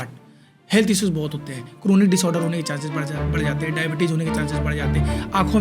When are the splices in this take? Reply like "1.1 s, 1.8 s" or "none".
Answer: none